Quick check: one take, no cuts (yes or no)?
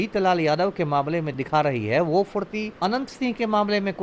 no